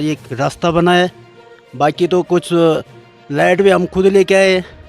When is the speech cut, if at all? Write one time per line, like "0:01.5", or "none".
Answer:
none